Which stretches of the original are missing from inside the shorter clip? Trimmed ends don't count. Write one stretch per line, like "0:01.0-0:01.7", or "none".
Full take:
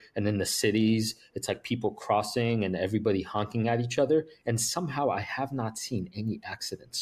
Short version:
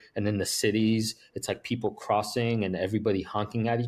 none